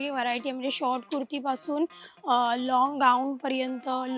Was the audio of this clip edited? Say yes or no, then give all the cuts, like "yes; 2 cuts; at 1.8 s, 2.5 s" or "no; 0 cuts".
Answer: no; 0 cuts